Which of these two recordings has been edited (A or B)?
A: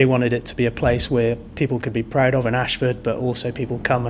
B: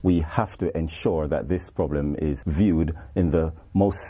B